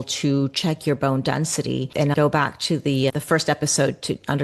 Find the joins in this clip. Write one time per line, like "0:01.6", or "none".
0:02.1

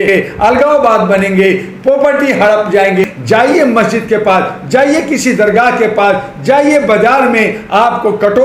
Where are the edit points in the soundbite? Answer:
0:03.0

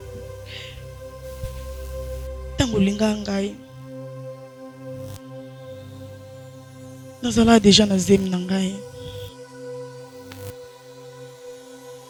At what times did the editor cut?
none

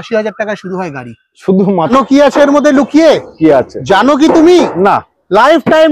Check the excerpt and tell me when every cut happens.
0:01.9

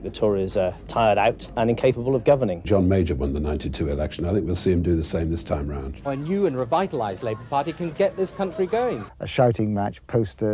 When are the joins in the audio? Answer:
0:01.5
0:02.6
0:06.1
0:09.0

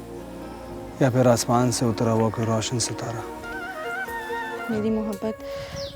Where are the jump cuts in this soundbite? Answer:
0:00.8
0:04.6

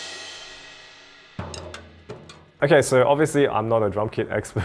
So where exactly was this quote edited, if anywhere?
none

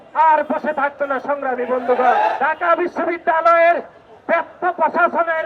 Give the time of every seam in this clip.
0:02.3

